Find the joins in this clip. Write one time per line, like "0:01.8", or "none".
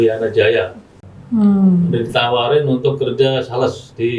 0:01.0